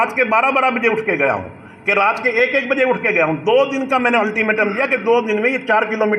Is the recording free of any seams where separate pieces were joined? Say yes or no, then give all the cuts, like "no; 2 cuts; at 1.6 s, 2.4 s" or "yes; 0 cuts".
yes; 0 cuts